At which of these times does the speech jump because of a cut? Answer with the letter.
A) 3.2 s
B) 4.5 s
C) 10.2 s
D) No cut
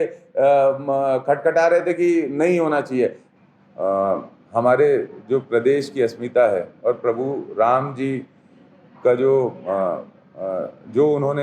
A